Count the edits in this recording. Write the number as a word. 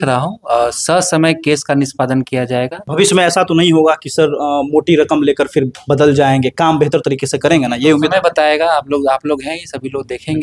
one